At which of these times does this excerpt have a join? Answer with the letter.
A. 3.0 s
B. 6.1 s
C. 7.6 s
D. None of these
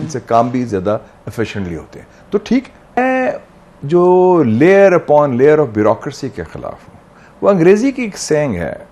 A